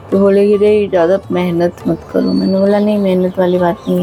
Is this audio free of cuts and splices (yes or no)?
yes